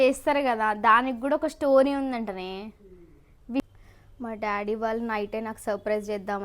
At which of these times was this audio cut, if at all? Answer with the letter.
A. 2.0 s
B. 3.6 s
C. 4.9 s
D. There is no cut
B